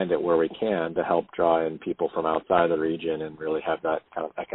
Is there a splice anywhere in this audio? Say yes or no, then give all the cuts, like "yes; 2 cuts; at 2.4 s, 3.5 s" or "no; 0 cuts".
no; 0 cuts